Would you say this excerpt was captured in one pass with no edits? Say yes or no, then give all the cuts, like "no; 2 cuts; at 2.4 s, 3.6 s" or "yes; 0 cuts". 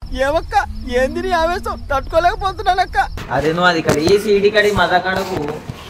no; 1 cut; at 3.2 s